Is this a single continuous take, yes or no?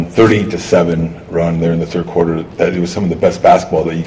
yes